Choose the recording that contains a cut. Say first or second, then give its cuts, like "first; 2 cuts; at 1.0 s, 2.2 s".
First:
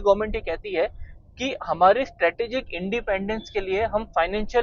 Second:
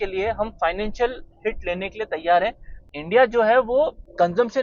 second; 1 cut; at 2.9 s